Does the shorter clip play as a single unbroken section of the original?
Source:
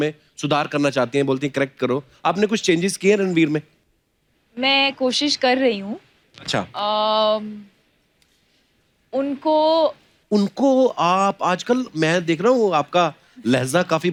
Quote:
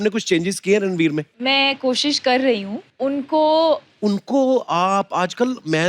no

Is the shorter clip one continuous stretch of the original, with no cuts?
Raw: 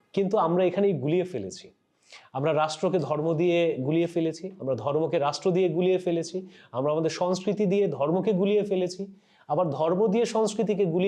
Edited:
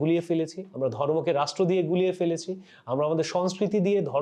yes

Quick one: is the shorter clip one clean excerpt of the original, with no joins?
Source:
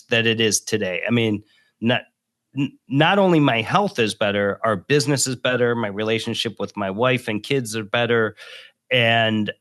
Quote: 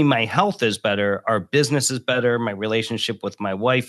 yes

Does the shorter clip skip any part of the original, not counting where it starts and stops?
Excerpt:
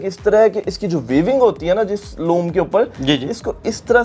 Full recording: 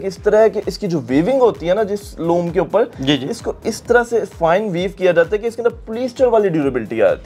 no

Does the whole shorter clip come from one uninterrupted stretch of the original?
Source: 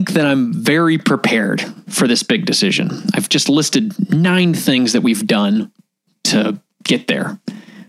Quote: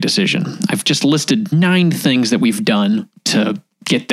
no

